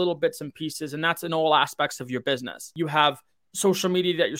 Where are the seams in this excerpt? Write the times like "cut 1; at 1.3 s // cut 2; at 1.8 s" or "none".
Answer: cut 1; at 2.7 s